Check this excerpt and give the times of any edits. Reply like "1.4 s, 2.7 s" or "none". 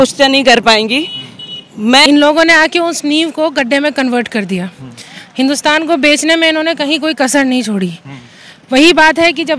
2.0 s